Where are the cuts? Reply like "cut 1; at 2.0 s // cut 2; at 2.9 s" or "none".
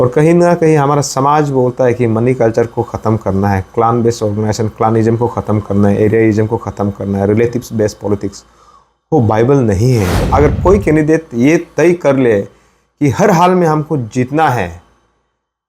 cut 1; at 10.2 s